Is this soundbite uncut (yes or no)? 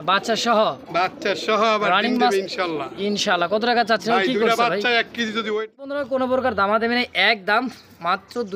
no